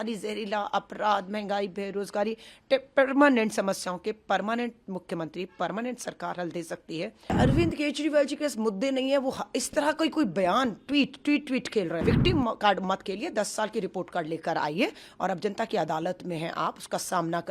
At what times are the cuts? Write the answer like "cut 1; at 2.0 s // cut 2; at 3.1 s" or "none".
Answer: cut 1; at 7.3 s // cut 2; at 12.0 s